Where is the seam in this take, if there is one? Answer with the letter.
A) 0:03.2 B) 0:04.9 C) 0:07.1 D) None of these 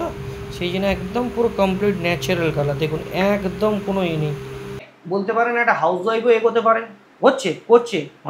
B